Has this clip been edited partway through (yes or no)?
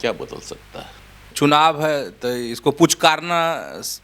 yes